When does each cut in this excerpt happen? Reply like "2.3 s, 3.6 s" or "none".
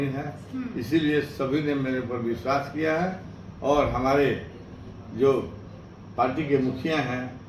none